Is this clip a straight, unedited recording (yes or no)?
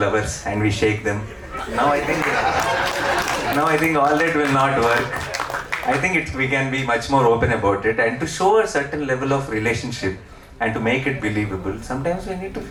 yes